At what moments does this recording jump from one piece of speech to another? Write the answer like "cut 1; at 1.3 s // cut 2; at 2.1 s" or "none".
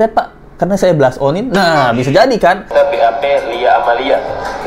cut 1; at 2.7 s